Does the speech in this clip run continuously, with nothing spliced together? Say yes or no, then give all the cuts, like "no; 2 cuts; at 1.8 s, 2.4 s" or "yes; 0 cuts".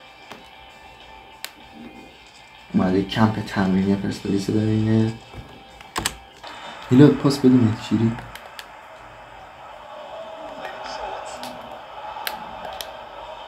no; 1 cut; at 6.5 s